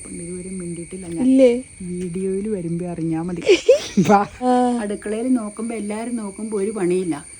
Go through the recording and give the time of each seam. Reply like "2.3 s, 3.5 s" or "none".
4.4 s